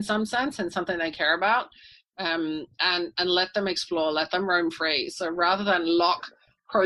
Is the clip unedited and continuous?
yes; 0 cuts

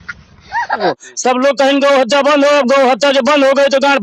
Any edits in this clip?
yes; 1 cut; at 1.0 s

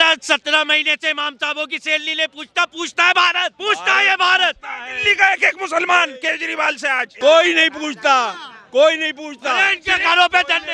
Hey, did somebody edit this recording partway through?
yes; 2 cuts; at 3.6 s, 7.1 s

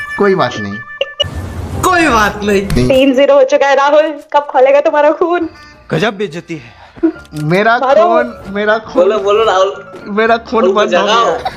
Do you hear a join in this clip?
yes; 1 cut; at 2.7 s

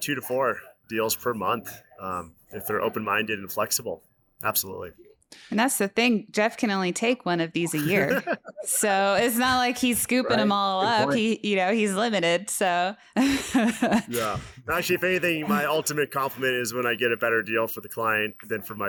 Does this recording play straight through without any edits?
yes; 0 cuts

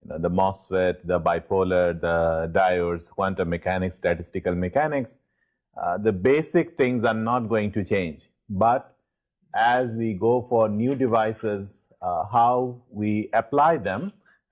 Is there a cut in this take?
yes; 1 cut; at 6.7 s

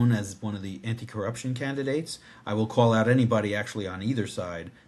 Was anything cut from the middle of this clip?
no; 0 cuts

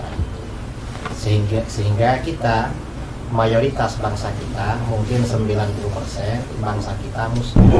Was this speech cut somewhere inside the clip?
no; 0 cuts

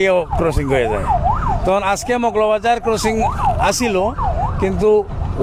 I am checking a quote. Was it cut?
no; 0 cuts

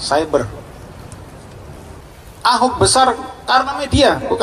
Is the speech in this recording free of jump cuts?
no; 1 cut; at 2.0 s

